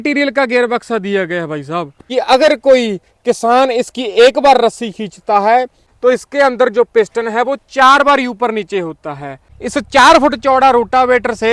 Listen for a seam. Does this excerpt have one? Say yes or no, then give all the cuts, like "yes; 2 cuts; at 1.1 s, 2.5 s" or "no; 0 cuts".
yes; 2 cuts; at 1.9 s, 9.4 s